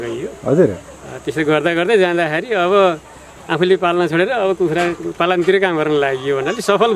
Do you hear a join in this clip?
no; 0 cuts

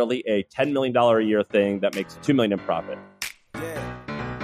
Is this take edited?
yes; 1 cut; at 2.9 s

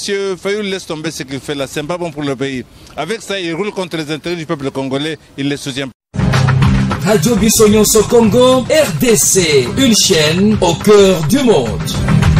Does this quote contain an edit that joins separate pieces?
yes; 1 cut; at 5.9 s

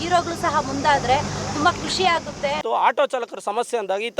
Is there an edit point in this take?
yes; 1 cut; at 2.6 s

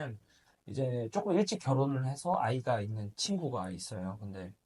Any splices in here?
no; 0 cuts

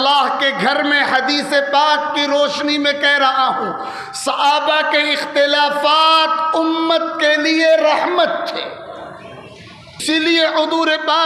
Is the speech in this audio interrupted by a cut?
yes; 1 cut; at 10.0 s

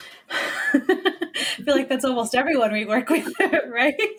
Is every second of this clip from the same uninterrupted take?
yes; 0 cuts

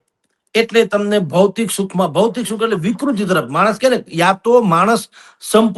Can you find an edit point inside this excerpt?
no; 0 cuts

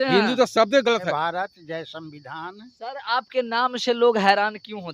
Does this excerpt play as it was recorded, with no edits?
no; 1 cut; at 1.1 s

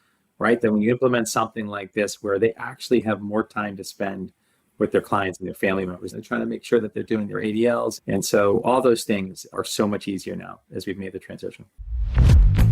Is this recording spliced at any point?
yes; 1 cut; at 11.8 s

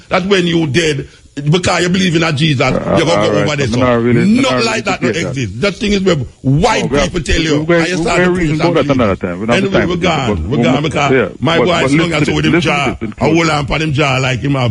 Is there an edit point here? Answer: no; 0 cuts

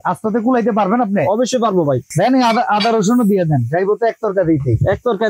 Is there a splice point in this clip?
yes; 1 cut; at 2.1 s

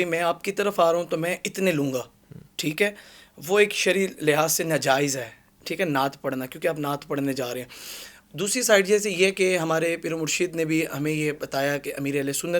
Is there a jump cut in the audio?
no; 0 cuts

